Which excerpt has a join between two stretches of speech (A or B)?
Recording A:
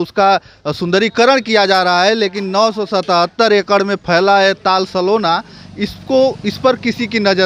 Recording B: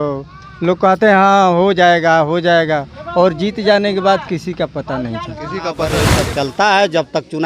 B